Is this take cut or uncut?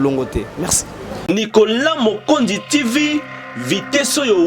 cut